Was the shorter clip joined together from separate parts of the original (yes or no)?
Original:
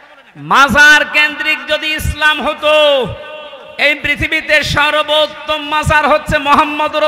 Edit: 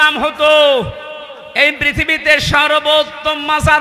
no